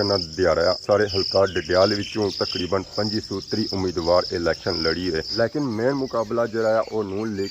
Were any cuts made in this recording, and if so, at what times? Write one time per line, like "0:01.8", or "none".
0:00.8
0:05.3